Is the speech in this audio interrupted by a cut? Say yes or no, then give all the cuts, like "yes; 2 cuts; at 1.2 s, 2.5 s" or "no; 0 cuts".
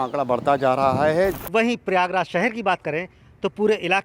yes; 1 cut; at 1.4 s